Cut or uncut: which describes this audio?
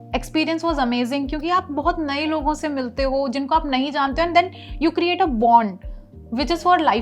uncut